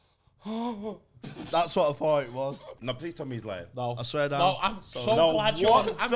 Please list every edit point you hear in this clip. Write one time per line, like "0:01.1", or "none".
0:02.8

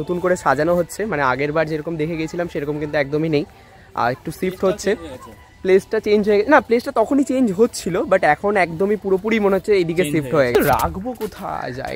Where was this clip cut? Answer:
0:10.5

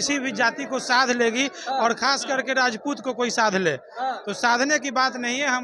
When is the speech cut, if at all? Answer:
none

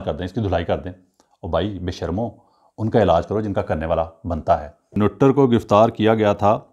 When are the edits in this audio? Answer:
0:05.0

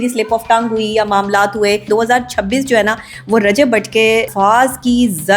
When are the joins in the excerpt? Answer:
0:01.9
0:04.3

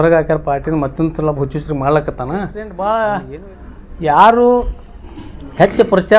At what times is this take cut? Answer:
0:02.6

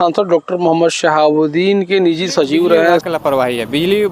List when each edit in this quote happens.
0:03.1

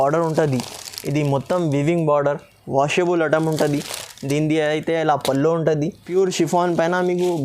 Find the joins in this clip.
0:06.0

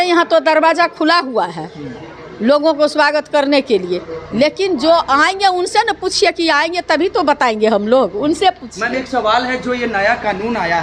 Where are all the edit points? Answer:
none

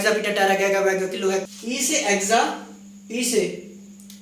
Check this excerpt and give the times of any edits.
0:01.4

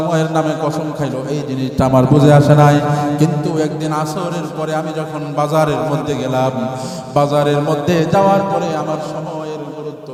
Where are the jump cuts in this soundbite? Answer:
none

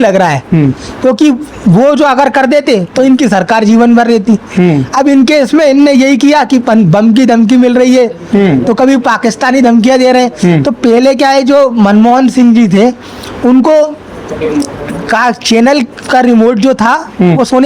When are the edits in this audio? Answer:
none

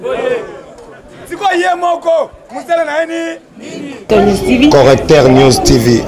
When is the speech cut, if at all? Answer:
0:03.9

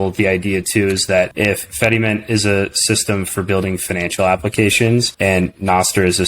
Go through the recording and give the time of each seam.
0:01.3
0:05.1

